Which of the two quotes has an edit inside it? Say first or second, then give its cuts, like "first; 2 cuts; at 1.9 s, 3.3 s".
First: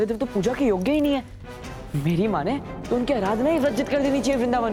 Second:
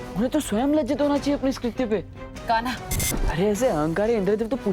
second; 1 cut; at 3.1 s